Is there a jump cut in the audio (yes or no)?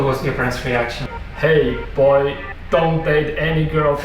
yes